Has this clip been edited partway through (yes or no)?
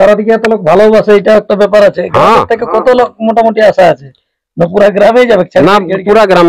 no